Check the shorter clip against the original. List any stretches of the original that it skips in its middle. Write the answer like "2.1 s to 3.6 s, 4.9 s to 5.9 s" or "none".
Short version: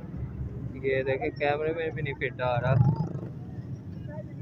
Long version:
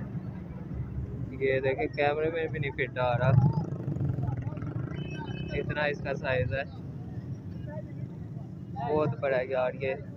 3.8 s to 6.9 s